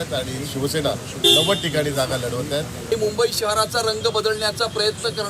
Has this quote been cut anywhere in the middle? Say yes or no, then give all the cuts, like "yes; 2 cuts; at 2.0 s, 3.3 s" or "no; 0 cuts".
yes; 1 cut; at 2.9 s